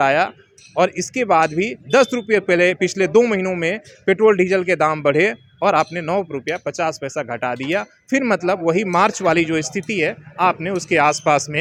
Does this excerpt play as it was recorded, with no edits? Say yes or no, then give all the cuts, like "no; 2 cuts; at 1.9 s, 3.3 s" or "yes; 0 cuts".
yes; 0 cuts